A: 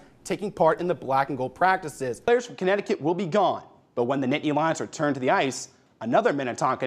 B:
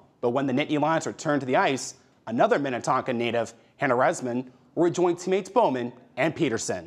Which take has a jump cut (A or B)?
A